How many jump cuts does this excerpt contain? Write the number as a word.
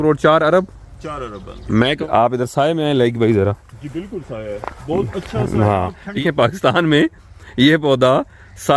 two